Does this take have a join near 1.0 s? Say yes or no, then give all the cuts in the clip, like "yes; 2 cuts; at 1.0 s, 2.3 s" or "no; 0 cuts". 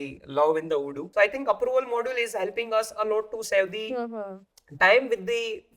yes; 1 cut; at 1.0 s